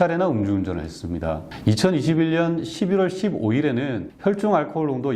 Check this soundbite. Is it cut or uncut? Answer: uncut